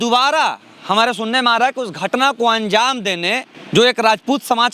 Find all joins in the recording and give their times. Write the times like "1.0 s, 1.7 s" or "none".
3.5 s